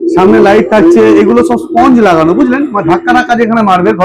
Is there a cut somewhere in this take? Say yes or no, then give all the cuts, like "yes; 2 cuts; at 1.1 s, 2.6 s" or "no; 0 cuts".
no; 0 cuts